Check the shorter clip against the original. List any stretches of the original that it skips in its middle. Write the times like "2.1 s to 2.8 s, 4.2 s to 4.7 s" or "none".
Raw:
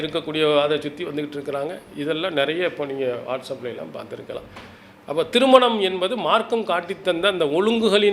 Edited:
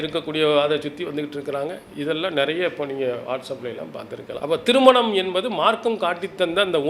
4.4 s to 5.0 s